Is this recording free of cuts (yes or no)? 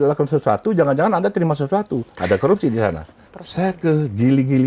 no